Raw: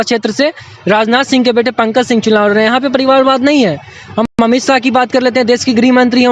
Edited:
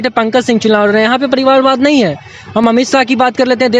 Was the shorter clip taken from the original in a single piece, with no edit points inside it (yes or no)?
no